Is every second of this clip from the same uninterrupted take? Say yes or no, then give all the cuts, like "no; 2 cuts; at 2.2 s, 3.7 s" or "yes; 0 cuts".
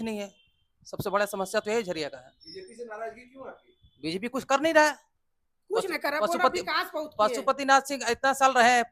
yes; 0 cuts